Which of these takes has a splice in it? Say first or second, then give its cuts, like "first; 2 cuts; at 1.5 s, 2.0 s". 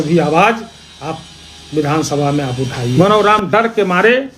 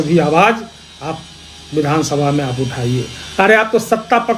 first; 1 cut; at 2.9 s